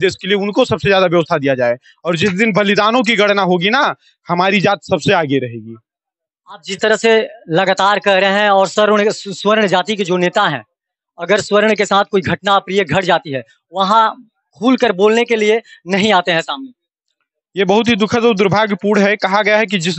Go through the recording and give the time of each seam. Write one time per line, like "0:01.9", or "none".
none